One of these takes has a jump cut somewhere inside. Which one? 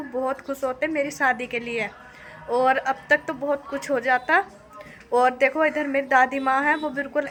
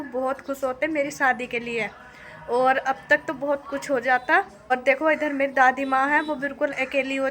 second; 1 cut; at 4.7 s

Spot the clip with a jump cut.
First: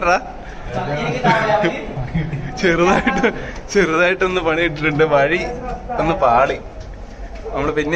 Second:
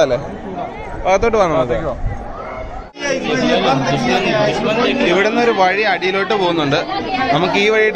second; 1 cut; at 3.0 s

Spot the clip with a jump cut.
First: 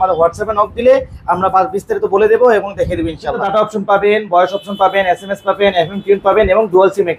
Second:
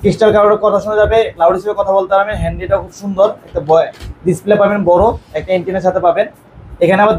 first; 1 cut; at 3.5 s

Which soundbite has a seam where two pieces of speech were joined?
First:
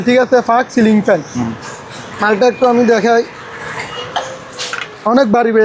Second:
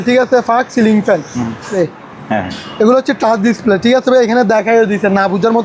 second; 1 cut; at 1.8 s

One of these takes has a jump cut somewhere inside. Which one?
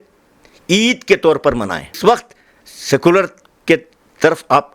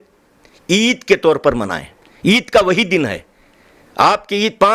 first; 1 cut; at 2.0 s

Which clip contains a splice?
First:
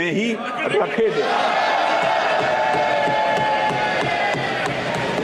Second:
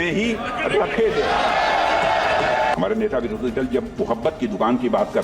second; 1 cut; at 2.7 s

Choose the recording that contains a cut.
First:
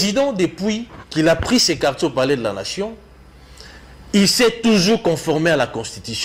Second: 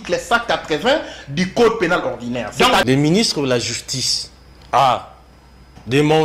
second; 1 cut; at 2.8 s

